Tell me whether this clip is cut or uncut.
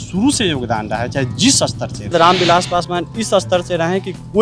cut